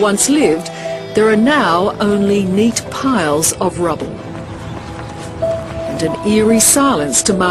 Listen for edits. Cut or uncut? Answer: cut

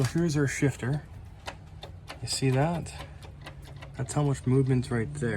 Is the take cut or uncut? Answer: cut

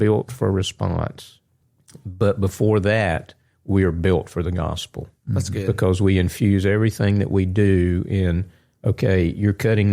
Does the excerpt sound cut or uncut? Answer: uncut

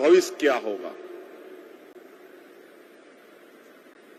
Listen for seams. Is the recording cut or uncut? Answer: uncut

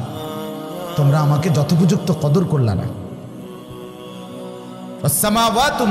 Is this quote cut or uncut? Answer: cut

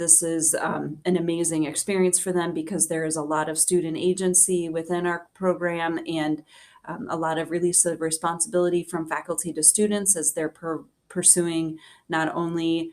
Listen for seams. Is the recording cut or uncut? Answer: uncut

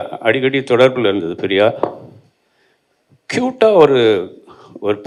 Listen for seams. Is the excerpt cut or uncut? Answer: uncut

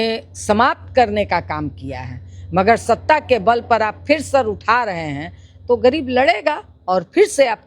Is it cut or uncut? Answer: uncut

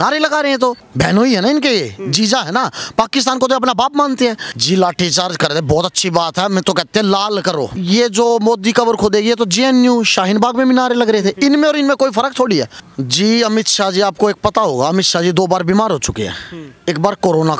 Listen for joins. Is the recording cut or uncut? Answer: cut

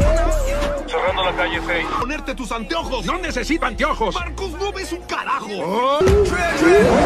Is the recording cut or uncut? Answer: uncut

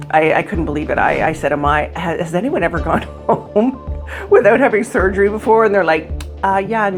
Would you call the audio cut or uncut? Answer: uncut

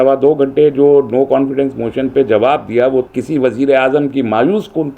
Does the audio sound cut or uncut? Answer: cut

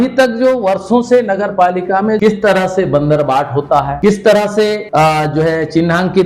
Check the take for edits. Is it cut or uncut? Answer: cut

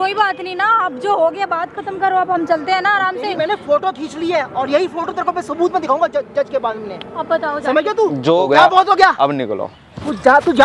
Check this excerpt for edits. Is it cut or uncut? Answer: cut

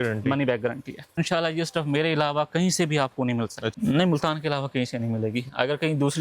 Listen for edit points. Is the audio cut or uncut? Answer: cut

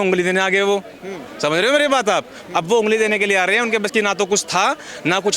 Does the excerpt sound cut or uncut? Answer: uncut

